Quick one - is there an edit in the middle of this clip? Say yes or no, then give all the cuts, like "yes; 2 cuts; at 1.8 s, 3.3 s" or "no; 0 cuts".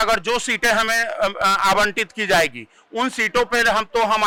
no; 0 cuts